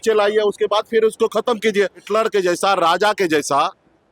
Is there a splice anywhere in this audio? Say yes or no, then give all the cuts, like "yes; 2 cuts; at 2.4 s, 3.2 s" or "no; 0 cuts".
yes; 1 cut; at 2.0 s